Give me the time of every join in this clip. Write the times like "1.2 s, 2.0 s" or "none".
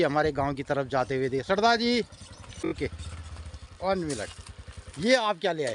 2.7 s